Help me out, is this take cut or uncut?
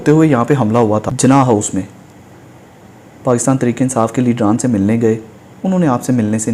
cut